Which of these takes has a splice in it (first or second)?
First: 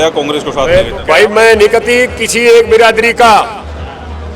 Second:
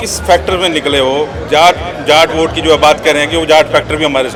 first